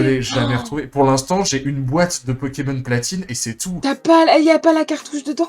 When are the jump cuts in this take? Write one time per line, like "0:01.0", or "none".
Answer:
none